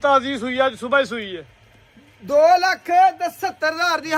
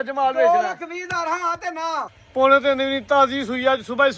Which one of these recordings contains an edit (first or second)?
second